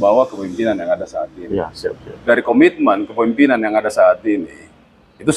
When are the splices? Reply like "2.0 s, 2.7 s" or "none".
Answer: 2.1 s